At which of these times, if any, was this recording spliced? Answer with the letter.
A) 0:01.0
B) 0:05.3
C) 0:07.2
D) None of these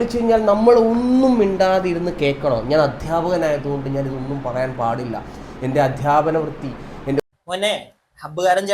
C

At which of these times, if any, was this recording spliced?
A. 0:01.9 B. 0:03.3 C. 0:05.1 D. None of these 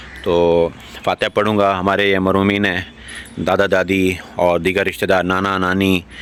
D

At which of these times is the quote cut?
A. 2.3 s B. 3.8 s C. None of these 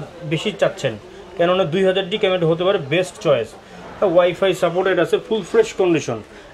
C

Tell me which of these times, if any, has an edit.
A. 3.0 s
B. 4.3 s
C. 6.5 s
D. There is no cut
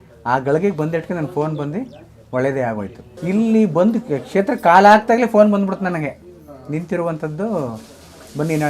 A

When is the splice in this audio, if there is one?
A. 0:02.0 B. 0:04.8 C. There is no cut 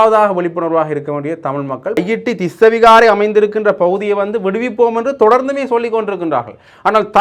A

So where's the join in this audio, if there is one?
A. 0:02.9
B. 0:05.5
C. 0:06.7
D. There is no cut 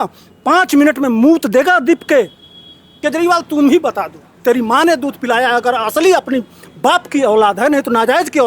A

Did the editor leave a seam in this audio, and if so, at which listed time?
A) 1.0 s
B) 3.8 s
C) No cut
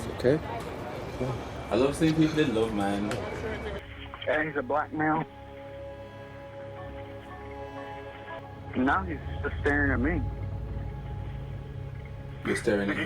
B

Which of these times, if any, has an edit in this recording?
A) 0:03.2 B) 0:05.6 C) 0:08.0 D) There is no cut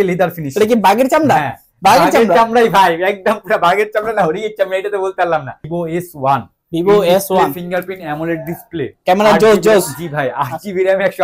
B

